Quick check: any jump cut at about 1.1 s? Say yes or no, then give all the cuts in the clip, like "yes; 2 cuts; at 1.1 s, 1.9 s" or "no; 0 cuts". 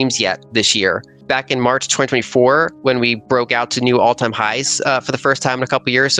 yes; 1 cut; at 1.1 s